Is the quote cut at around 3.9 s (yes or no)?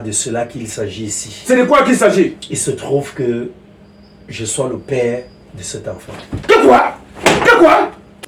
no